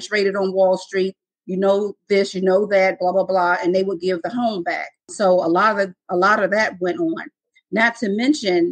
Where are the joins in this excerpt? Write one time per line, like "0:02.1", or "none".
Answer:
0:05.1